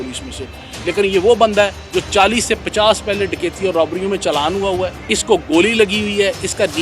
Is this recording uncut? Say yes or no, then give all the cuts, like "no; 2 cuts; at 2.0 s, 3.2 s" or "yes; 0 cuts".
no; 2 cuts; at 1.8 s, 5.0 s